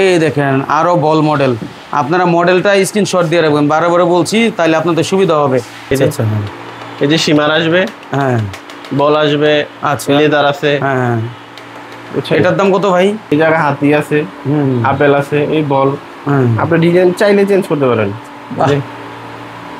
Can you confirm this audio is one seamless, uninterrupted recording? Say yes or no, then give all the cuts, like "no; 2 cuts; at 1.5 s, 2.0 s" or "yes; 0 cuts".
no; 2 cuts; at 5.9 s, 13.3 s